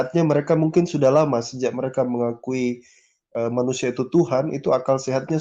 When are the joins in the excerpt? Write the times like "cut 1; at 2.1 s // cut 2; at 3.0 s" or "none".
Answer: none

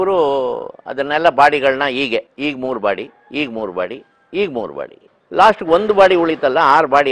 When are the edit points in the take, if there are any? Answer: none

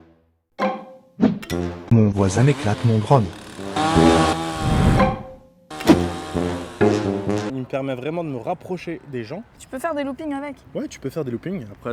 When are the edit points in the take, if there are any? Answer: none

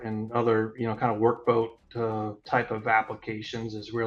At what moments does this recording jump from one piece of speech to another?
none

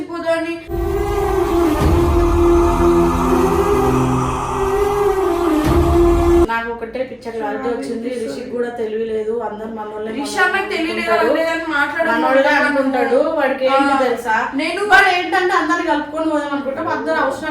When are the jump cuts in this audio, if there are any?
cut 1; at 6.5 s

